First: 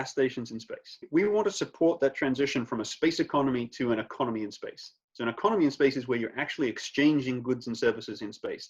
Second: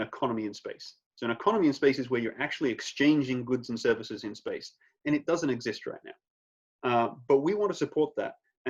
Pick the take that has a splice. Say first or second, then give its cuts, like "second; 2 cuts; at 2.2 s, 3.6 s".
first; 1 cut; at 1.1 s